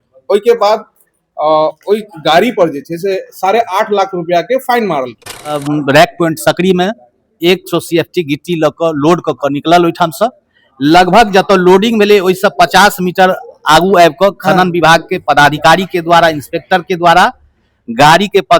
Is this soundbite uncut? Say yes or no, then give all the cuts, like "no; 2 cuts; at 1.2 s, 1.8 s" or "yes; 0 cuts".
no; 1 cut; at 5.6 s